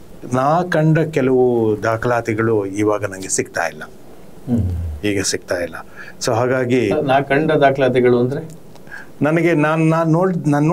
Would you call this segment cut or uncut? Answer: uncut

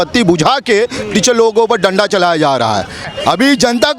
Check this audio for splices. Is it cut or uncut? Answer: cut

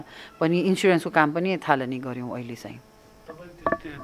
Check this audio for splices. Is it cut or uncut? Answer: uncut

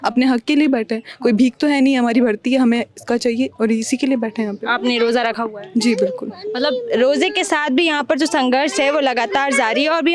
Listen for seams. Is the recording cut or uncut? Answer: uncut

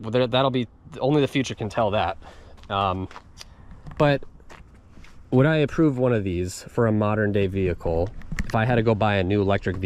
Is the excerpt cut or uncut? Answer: uncut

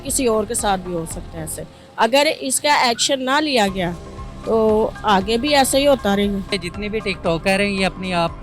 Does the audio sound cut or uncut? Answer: cut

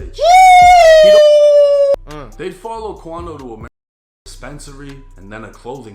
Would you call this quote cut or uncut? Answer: cut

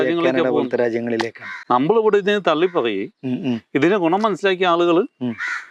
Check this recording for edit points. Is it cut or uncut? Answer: uncut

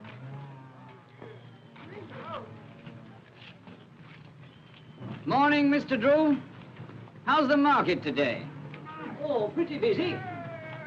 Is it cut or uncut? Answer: uncut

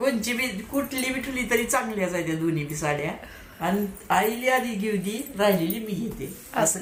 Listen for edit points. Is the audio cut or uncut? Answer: uncut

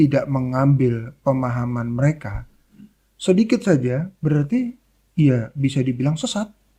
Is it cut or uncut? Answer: uncut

